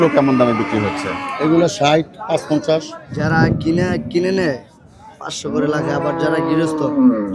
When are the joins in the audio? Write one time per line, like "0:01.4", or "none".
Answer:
0:03.0